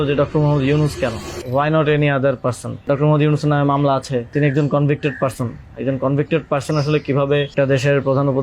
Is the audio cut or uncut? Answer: cut